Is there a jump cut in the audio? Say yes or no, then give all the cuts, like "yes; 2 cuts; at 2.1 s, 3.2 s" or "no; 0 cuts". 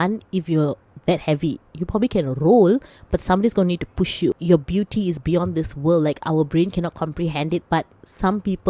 yes; 2 cuts; at 4.3 s, 7.6 s